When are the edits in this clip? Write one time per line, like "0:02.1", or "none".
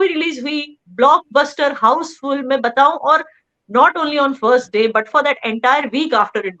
none